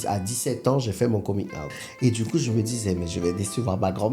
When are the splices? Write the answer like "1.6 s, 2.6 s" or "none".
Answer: 1.8 s